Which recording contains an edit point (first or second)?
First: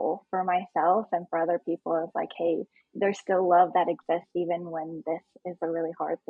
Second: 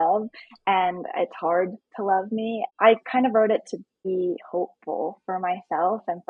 second